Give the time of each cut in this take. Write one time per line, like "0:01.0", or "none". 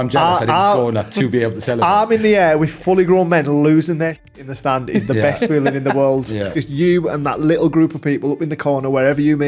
0:06.5